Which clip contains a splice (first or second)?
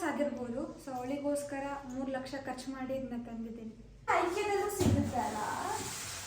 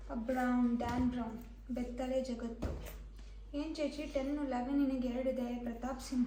first